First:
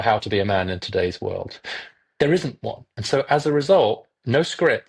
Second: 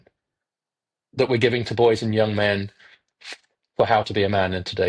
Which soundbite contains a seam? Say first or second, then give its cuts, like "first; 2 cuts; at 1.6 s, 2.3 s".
first; 1 cut; at 2.9 s